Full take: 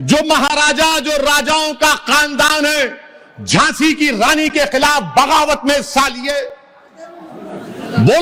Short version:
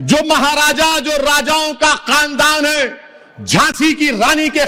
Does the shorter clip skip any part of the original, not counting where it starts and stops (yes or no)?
no